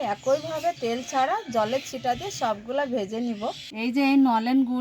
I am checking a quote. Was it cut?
yes; 1 cut; at 3.7 s

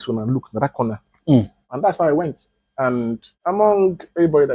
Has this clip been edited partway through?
yes; 2 cuts; at 1.7 s, 3.3 s

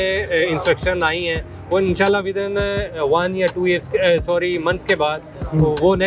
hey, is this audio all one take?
yes; 0 cuts

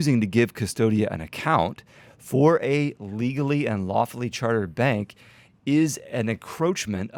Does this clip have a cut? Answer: no; 0 cuts

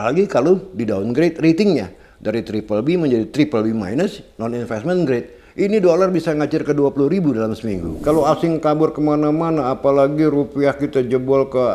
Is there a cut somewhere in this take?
yes; 1 cut; at 7.9 s

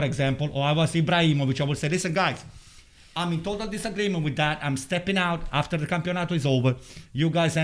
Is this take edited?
no; 0 cuts

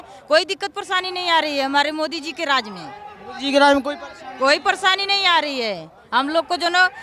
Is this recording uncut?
yes; 0 cuts

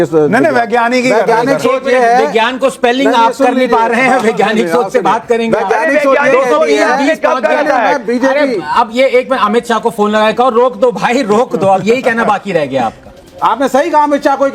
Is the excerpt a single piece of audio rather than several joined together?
yes; 0 cuts

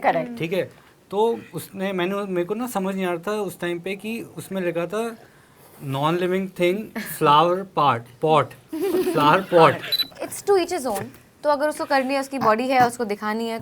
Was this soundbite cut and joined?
yes; 1 cut; at 9.9 s

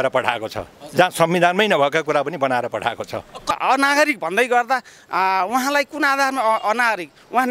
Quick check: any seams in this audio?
yes; 1 cut; at 3.5 s

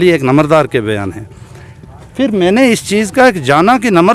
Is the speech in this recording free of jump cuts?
yes; 0 cuts

